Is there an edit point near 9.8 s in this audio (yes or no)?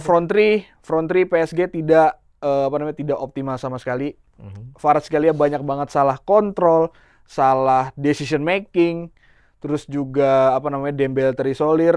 no